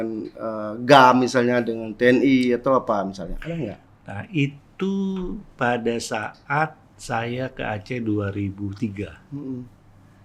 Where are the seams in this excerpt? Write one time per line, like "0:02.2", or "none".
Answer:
none